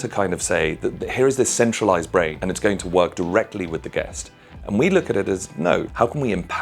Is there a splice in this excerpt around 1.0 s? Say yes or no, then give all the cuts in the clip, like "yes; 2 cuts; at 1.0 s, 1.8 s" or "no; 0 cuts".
no; 1 cut; at 2.4 s